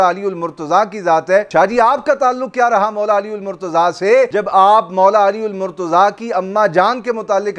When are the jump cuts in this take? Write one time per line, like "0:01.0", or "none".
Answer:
0:01.5
0:04.3